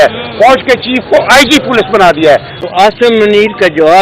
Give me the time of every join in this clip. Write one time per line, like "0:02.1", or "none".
0:03.0